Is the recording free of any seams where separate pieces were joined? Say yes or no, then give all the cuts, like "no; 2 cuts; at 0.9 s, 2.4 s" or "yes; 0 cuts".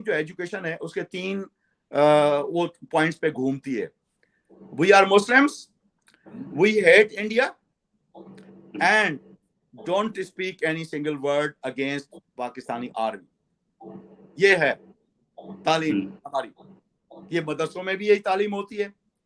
yes; 0 cuts